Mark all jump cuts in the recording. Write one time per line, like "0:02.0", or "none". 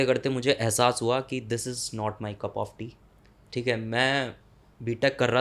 none